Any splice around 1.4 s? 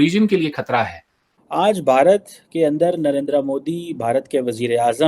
yes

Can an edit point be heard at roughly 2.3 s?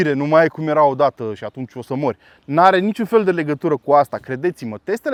no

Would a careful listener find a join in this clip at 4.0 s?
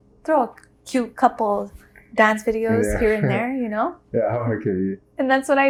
no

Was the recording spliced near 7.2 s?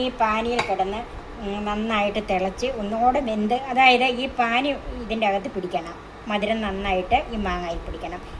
no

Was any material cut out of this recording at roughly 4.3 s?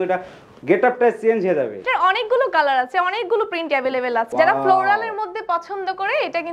yes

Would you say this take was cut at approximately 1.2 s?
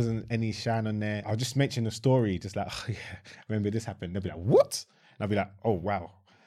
yes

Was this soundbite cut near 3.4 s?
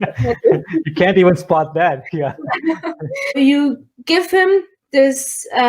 yes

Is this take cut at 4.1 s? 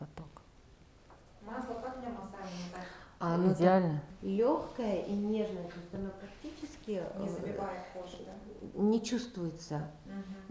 yes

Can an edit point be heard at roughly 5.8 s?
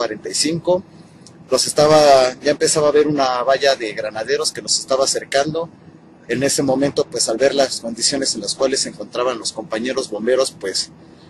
yes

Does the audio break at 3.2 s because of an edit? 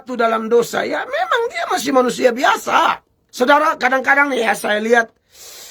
yes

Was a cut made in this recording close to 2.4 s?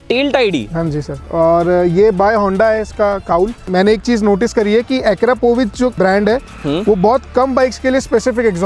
no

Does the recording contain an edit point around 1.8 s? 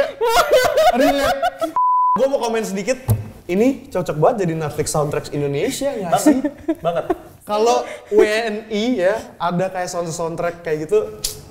yes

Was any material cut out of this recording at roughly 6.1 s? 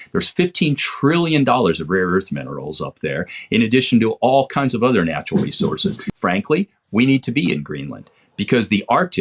yes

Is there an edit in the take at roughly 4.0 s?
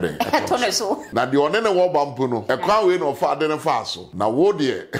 yes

